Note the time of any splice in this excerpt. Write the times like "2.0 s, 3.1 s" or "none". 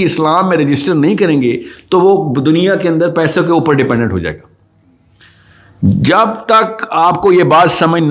none